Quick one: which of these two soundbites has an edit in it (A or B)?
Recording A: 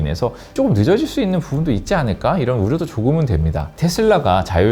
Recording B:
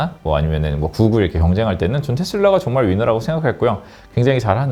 A